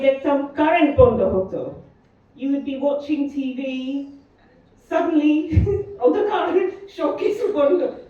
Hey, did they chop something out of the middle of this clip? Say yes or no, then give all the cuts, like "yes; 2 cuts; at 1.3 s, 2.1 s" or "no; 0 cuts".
no; 0 cuts